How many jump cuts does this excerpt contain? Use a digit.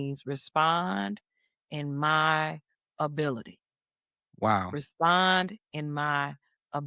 0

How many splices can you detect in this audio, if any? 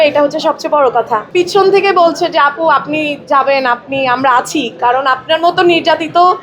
1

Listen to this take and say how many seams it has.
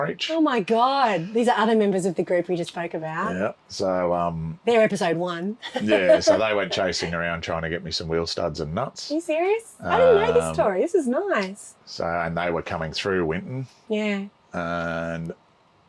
0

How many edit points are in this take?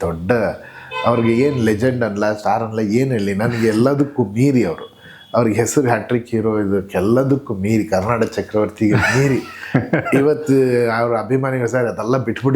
0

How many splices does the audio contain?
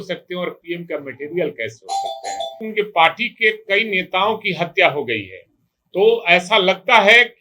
1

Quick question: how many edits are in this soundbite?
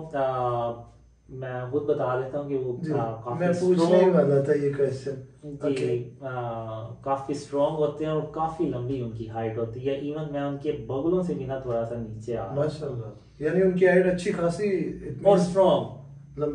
0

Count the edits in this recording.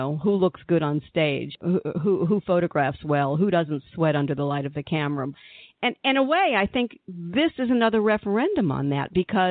1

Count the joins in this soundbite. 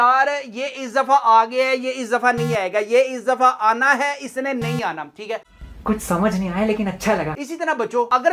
0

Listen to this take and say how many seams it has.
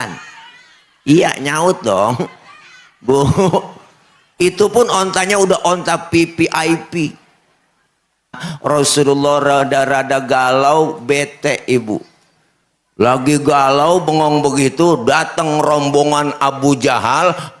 1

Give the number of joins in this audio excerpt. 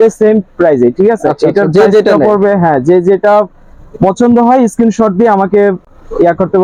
0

